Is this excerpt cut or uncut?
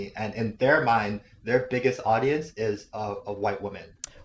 uncut